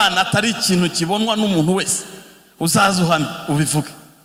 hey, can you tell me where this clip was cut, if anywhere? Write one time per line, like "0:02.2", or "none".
none